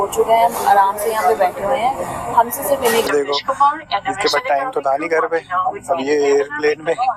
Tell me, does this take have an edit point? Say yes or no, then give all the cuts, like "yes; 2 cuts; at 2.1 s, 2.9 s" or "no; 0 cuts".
yes; 1 cut; at 3.1 s